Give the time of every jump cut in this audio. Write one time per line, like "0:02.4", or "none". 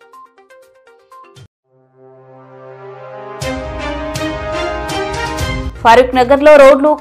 0:05.6